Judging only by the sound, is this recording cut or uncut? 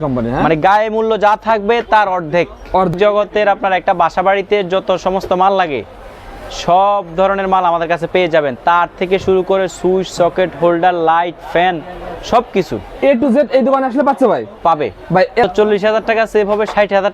cut